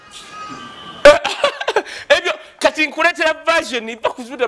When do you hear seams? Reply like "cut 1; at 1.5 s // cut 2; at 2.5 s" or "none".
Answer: none